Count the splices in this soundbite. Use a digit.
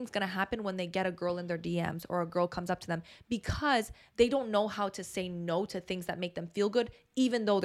0